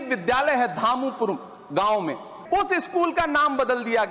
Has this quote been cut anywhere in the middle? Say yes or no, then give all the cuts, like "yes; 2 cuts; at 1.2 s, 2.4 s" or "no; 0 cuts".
yes; 1 cut; at 2.3 s